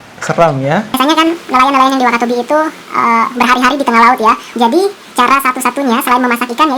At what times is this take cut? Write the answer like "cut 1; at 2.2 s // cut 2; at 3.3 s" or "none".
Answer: cut 1; at 1.0 s // cut 2; at 4.4 s